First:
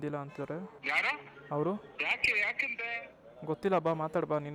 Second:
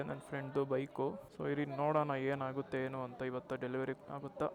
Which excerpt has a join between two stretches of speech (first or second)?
second